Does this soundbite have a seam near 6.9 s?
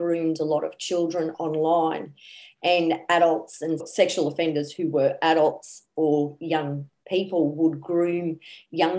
no; 0 cuts

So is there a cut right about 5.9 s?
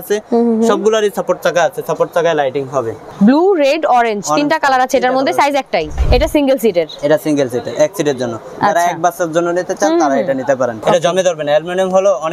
yes; 3 cuts; at 3.0 s, 5.9 s, 10.8 s

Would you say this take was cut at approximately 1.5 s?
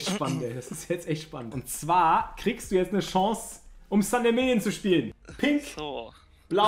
yes; 2 cuts; at 1.5 s, 5.2 s

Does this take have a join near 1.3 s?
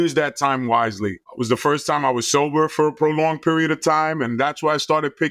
yes; 1 cut; at 1.3 s

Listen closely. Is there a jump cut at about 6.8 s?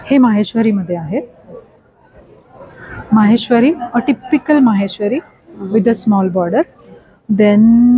no; 0 cuts

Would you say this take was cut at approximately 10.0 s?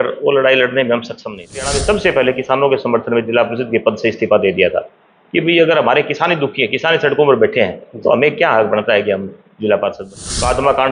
yes; 2 cuts; at 1.7 s, 10.0 s

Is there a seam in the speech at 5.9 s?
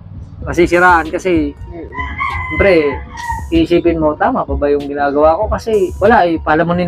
yes; 1 cut; at 5.9 s

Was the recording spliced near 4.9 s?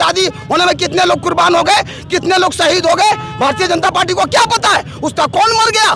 no; 0 cuts

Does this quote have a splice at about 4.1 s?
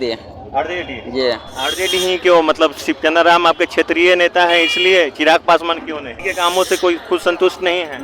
no; 1 cut; at 6.2 s

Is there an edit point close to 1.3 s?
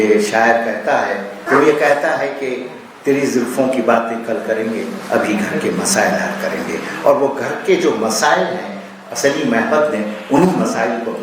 yes; 1 cut; at 1.3 s

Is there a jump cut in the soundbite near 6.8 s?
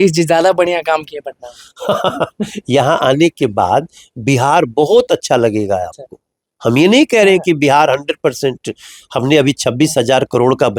no; 0 cuts

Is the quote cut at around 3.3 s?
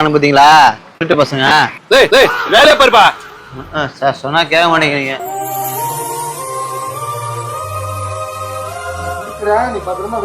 yes; 1 cut; at 3.3 s

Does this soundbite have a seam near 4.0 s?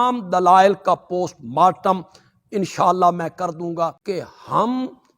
yes; 1 cut; at 4.0 s

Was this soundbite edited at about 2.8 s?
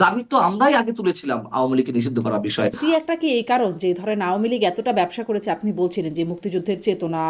yes; 1 cut; at 2.8 s

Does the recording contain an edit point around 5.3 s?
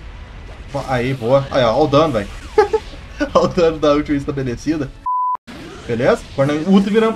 yes; 1 cut; at 5.3 s

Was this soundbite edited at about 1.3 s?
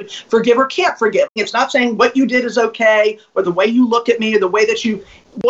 yes; 1 cut; at 1.3 s

